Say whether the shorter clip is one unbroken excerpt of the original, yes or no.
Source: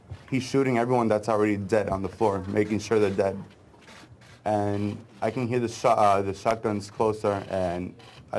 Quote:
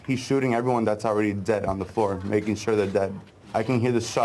no